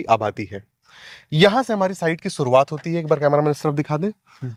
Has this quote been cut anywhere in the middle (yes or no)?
no